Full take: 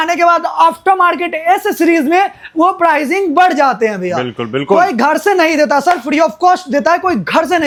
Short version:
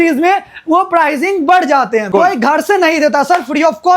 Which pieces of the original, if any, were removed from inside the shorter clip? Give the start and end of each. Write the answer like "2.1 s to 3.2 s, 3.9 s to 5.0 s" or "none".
3.9 s to 4.6 s

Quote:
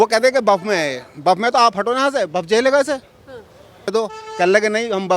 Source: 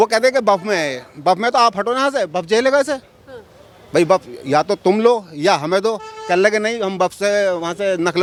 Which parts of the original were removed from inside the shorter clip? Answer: 3.9 s to 5.8 s

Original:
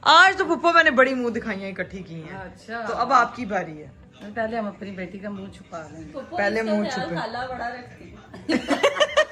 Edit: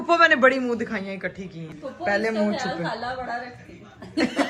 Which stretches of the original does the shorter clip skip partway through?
2.2 s to 6.0 s

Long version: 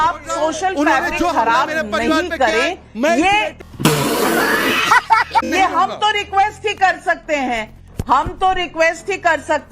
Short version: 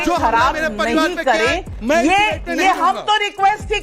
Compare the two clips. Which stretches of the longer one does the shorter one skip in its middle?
3.7 s to 5.5 s

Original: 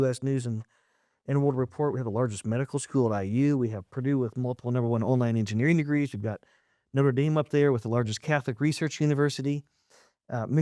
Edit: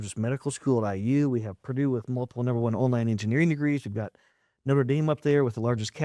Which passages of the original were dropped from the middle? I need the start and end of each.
none

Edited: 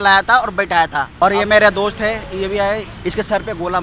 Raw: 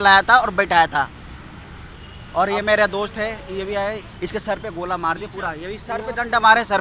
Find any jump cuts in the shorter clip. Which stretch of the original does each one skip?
1.1 s to 2.3 s

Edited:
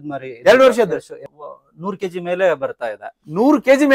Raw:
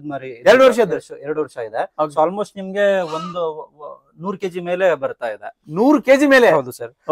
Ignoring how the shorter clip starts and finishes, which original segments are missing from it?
1.2 s to 3.6 s

